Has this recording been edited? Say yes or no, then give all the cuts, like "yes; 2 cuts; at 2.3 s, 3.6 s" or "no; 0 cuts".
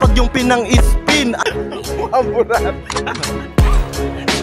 yes; 1 cut; at 1.4 s